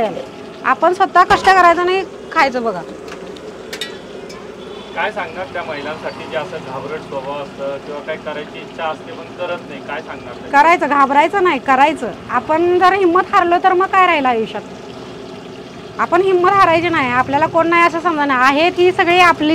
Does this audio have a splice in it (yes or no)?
no